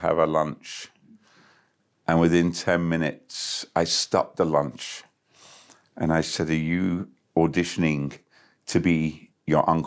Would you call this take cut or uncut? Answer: uncut